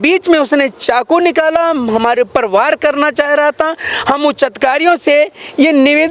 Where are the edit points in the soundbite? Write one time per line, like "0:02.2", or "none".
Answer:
none